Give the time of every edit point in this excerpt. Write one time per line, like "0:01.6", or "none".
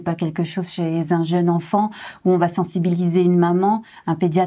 none